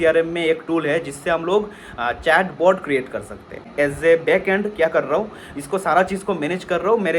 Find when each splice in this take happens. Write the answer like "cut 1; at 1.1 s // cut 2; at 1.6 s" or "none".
cut 1; at 3.7 s